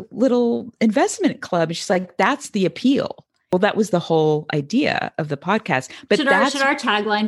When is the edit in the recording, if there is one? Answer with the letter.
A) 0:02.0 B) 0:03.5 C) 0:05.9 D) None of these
C